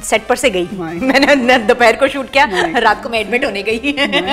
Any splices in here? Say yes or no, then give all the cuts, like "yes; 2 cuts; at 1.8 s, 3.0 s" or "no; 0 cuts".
no; 0 cuts